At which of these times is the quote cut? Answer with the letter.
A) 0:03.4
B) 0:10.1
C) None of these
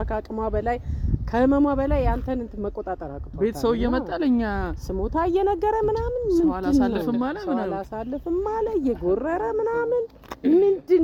C